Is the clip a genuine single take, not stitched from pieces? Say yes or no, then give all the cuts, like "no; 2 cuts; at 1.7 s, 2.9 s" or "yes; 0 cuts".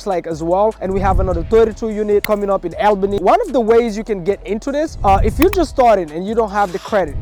no; 1 cut; at 3.2 s